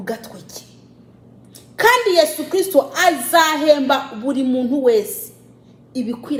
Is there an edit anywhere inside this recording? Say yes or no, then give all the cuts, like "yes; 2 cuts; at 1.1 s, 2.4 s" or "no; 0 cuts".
no; 0 cuts